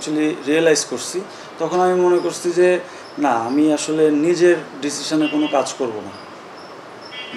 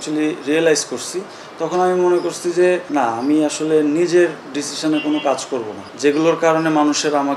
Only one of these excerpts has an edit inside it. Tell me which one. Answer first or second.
second